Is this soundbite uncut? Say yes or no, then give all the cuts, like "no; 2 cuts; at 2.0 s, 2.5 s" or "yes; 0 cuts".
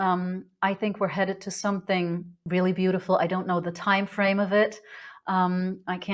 no; 1 cut; at 2.3 s